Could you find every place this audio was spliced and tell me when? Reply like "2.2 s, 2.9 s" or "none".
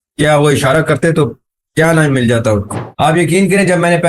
2.8 s